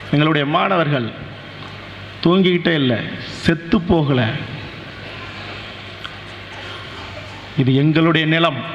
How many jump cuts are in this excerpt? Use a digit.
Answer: 0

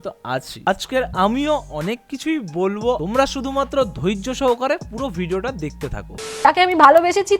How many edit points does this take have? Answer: 2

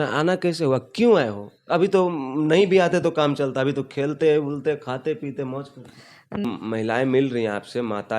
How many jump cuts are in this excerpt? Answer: 1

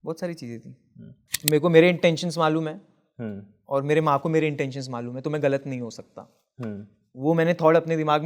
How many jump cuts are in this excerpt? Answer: 1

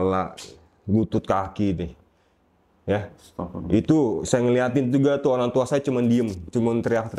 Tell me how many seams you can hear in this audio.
0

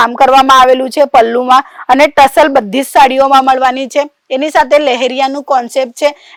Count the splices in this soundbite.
0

